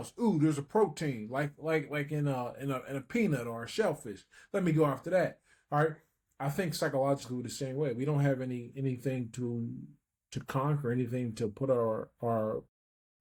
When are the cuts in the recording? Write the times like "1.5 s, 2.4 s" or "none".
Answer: none